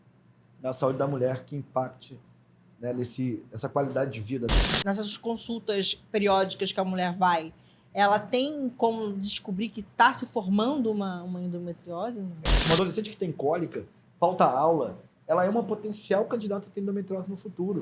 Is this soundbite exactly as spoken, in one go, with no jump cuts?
no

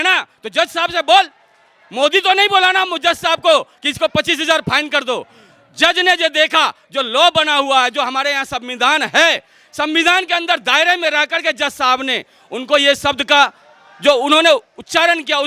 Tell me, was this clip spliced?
no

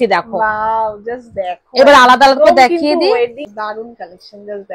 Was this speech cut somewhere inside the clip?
yes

